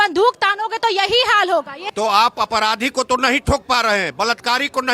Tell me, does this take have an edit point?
yes; 1 cut; at 1.8 s

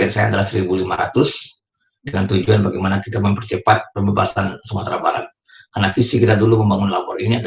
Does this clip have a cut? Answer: no; 0 cuts

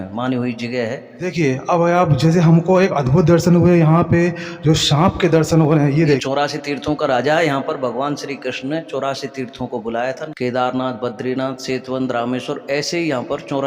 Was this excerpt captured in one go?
no; 3 cuts; at 1.2 s, 6.2 s, 10.2 s

